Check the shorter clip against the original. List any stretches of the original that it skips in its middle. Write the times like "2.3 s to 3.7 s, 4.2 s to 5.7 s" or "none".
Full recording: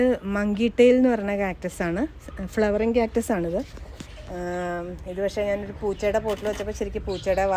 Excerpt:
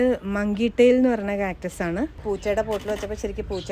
2.2 s to 5.7 s